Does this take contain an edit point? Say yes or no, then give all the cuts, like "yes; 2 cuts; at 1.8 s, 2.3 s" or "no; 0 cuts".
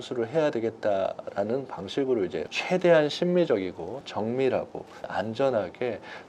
yes; 1 cut; at 2.5 s